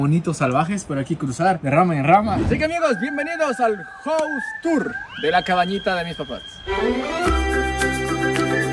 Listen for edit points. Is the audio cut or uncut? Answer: cut